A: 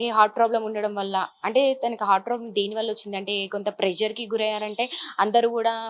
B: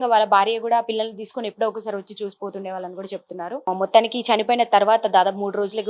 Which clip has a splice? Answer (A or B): B